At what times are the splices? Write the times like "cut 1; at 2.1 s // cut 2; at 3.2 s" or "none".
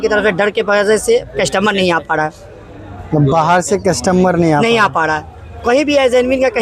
none